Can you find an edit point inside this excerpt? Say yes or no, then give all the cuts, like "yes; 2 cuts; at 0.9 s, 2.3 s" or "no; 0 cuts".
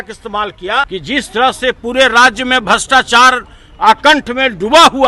yes; 1 cut; at 0.9 s